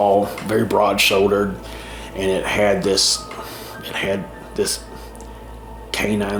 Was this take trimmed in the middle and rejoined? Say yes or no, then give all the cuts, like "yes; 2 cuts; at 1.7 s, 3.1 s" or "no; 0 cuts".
no; 0 cuts